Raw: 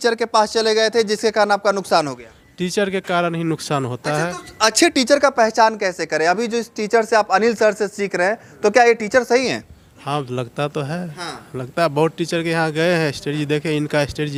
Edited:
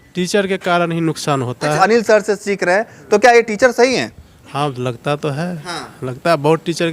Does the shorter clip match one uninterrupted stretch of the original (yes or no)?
no